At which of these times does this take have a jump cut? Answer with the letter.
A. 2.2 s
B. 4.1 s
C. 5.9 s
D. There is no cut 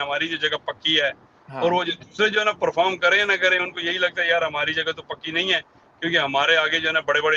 D